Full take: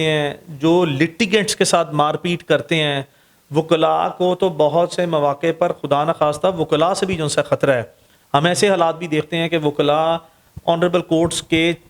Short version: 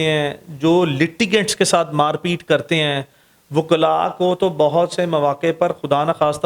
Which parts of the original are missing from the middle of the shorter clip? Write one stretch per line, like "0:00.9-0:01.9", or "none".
none